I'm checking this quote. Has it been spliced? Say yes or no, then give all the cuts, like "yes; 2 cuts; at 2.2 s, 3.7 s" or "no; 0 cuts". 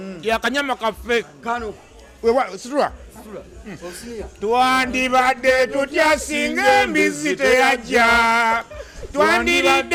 no; 0 cuts